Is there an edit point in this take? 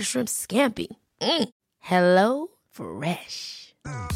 no; 0 cuts

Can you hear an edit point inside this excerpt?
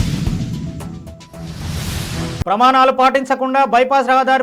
yes; 1 cut; at 2.4 s

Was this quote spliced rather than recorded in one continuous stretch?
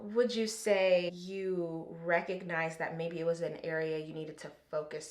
yes; 1 cut; at 1.2 s

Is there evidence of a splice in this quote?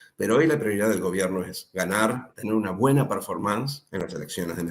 yes; 2 cuts; at 2.3 s, 3.8 s

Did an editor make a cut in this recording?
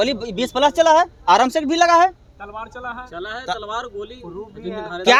no; 0 cuts

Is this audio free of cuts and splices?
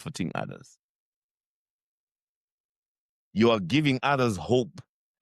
yes; 0 cuts

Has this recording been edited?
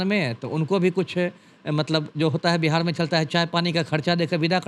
no; 0 cuts

